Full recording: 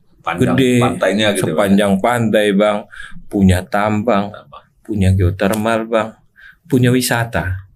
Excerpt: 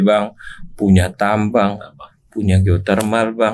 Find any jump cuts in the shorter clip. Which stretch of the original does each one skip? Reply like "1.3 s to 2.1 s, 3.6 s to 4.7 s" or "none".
none